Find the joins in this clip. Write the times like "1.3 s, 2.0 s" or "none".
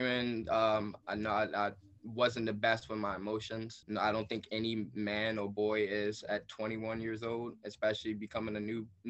1.0 s, 3.7 s